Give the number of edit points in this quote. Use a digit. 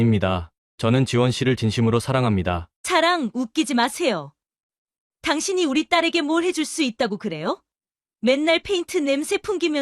1